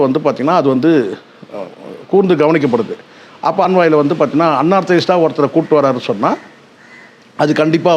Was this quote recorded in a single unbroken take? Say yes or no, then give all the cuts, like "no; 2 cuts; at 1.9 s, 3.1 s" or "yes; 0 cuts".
no; 1 cut; at 3.7 s